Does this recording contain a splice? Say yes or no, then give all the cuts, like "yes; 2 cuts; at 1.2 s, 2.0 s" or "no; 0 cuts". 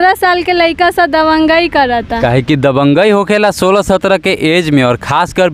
no; 0 cuts